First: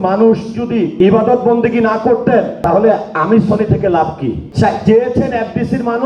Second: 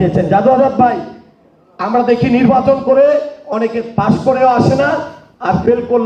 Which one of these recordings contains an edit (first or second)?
first